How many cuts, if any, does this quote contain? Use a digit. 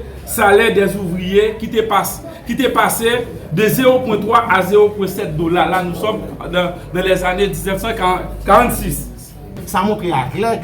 1